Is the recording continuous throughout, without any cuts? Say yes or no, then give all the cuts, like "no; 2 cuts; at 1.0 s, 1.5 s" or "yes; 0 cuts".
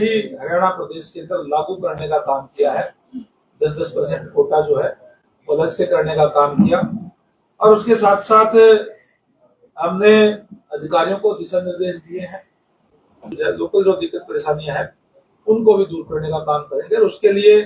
no; 1 cut; at 13.4 s